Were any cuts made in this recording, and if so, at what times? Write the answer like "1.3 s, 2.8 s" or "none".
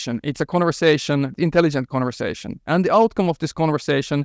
1.4 s